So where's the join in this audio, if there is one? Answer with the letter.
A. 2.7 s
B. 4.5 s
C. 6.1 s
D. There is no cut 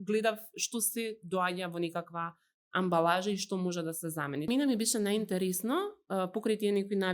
B